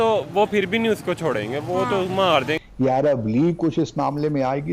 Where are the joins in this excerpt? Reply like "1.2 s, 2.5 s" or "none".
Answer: 2.6 s